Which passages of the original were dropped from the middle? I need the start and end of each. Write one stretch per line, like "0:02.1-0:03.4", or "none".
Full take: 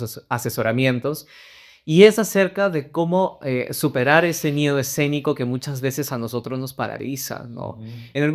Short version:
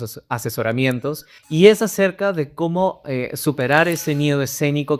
0:01.3-0:01.7